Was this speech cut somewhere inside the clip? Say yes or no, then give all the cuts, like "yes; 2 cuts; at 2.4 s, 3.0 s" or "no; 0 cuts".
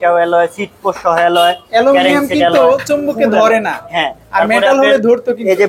no; 0 cuts